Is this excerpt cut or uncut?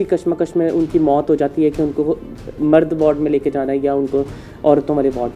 uncut